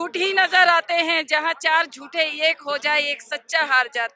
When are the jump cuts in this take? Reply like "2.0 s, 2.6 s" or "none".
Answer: none